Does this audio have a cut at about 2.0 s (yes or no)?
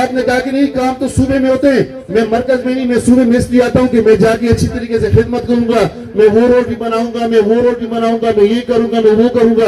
no